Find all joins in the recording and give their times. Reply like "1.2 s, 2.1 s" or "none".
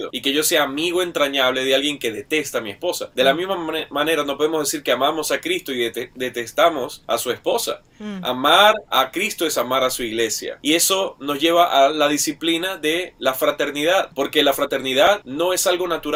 none